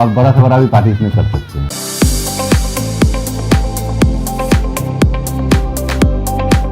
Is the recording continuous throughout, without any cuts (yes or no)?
no